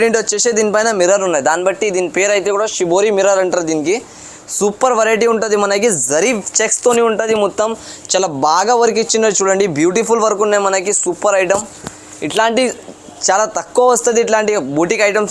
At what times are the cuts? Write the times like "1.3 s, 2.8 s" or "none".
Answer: none